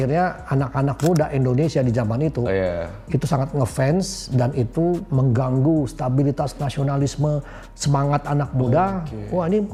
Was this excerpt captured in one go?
yes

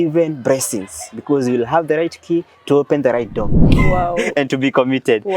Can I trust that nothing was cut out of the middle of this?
no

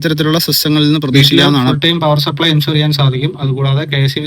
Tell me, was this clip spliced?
yes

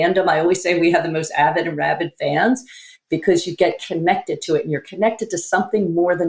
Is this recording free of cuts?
yes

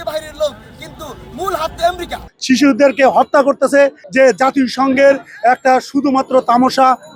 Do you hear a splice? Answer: yes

